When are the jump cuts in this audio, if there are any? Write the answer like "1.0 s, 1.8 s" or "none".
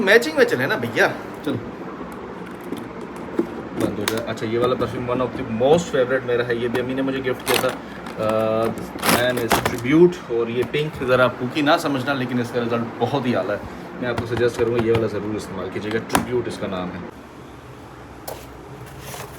none